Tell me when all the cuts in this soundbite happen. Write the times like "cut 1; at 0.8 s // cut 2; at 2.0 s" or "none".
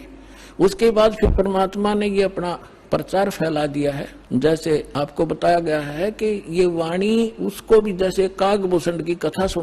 cut 1; at 4.1 s // cut 2; at 4.9 s